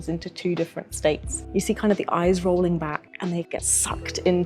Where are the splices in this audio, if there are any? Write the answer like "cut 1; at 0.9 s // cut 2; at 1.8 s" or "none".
cut 1; at 1.4 s // cut 2; at 3.4 s